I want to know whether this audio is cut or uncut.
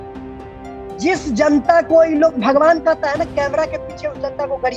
cut